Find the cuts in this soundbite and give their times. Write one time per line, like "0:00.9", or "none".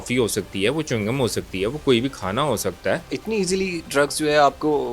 0:03.1